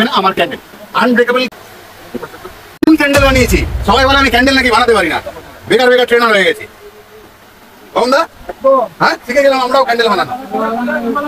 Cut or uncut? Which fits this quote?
cut